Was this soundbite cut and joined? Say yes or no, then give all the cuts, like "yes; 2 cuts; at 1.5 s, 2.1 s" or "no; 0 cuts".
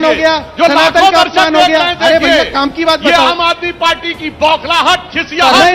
no; 0 cuts